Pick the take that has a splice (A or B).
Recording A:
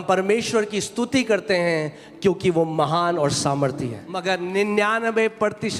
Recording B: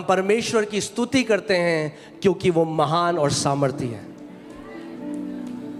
A